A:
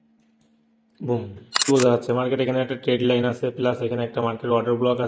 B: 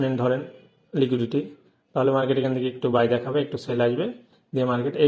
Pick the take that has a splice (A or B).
A